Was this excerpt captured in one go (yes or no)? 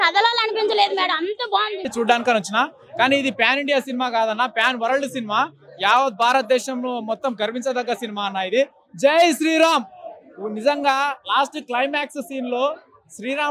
yes